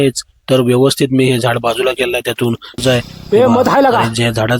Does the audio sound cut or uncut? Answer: cut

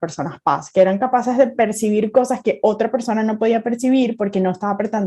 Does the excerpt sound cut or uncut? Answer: uncut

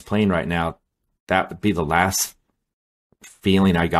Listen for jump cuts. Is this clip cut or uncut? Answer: uncut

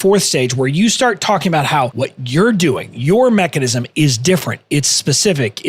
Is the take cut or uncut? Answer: cut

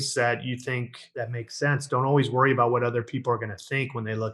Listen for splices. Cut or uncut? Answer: cut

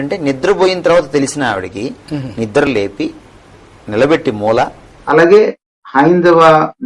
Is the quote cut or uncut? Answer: cut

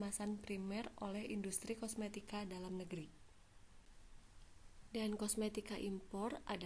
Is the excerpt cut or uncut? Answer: cut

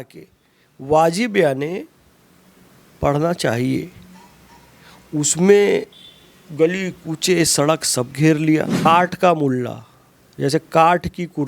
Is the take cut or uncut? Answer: cut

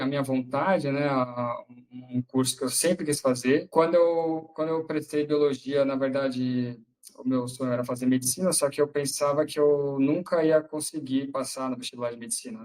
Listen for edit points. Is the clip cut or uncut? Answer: cut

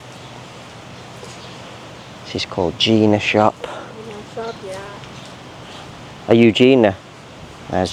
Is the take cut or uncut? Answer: uncut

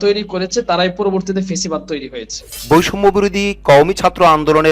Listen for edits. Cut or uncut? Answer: cut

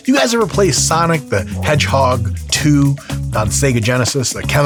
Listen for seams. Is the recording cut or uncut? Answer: uncut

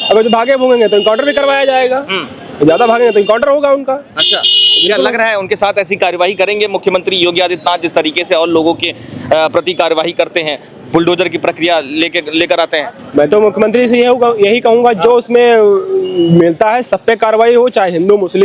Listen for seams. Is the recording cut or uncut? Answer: uncut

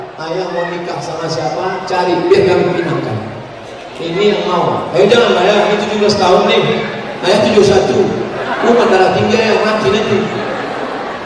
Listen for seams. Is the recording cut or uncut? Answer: uncut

